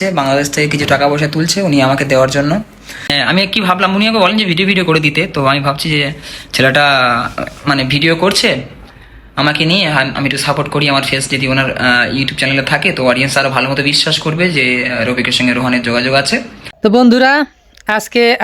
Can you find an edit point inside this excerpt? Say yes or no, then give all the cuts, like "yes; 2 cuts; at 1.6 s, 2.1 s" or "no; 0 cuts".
yes; 2 cuts; at 3.1 s, 16.6 s